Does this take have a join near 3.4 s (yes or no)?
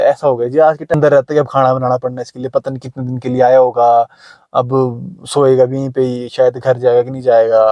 no